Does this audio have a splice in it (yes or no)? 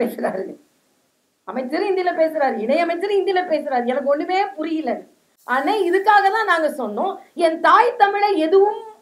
no